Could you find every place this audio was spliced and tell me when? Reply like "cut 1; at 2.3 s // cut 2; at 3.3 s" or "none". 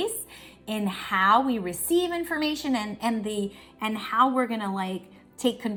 none